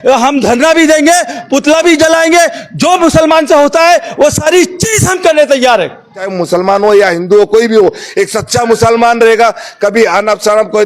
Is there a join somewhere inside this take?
yes; 1 cut; at 6.3 s

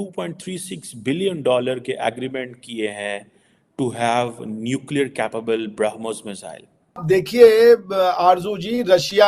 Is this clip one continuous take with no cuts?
no; 1 cut; at 6.9 s

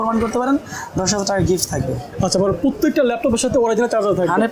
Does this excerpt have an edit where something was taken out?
no; 0 cuts

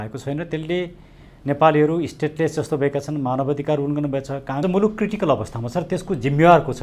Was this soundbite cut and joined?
yes; 1 cut; at 4.6 s

